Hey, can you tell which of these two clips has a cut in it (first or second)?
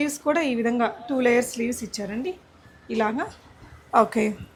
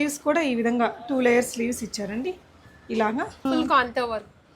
second